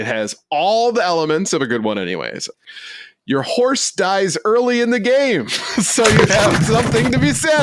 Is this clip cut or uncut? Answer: cut